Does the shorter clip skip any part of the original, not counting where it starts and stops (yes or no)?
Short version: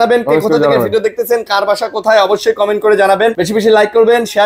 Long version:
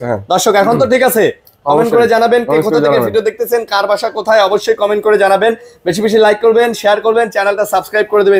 yes